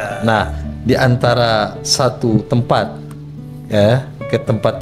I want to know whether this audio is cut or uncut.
uncut